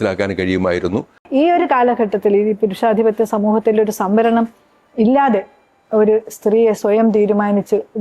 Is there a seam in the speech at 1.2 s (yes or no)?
yes